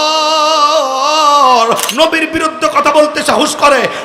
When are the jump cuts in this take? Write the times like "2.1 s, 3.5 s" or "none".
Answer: 1.9 s